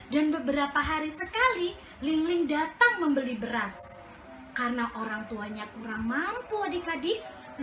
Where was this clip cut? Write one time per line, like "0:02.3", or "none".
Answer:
none